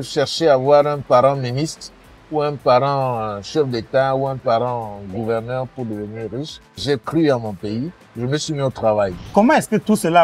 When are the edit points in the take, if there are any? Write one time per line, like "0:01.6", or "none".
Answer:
0:06.8
0:09.2